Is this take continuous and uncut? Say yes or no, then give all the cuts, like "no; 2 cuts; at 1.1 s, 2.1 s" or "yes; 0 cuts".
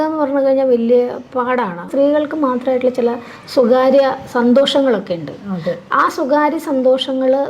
no; 1 cut; at 1.9 s